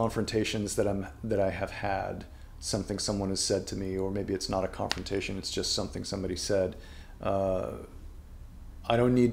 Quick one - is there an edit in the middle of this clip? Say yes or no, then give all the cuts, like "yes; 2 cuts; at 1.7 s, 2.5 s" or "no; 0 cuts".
no; 0 cuts